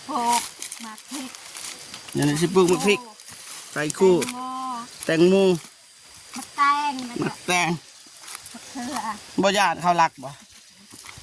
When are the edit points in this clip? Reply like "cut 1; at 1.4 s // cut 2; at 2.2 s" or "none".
none